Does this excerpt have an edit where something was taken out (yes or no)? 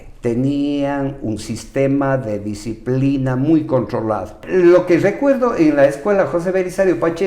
yes